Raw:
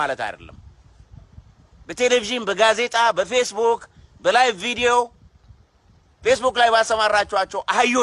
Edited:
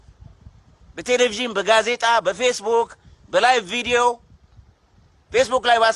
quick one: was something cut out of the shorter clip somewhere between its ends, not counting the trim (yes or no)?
no